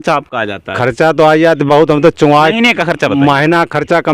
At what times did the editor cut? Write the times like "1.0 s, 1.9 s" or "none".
none